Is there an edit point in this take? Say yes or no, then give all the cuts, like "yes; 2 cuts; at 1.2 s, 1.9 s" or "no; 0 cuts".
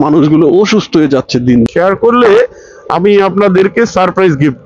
yes; 1 cut; at 1.7 s